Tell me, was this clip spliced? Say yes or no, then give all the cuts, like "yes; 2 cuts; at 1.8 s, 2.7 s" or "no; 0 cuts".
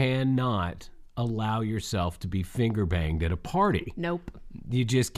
no; 0 cuts